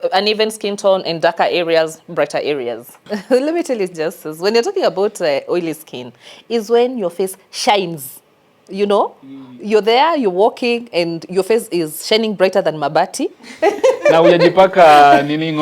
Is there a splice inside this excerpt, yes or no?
yes